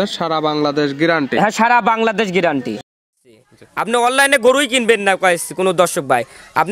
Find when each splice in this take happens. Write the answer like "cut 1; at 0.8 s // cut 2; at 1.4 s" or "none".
cut 1; at 3.1 s